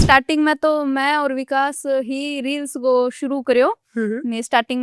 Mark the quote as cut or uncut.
uncut